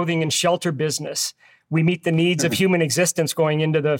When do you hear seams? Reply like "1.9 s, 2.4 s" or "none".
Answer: none